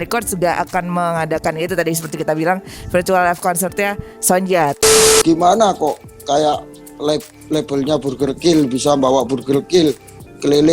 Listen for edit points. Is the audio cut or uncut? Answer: cut